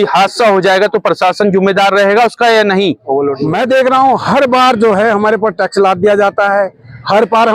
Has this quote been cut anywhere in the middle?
yes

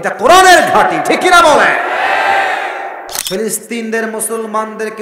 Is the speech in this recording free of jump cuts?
no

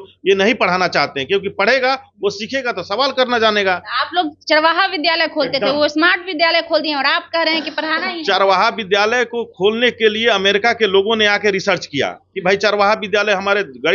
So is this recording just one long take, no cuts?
yes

